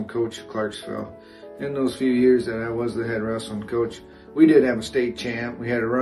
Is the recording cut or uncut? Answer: uncut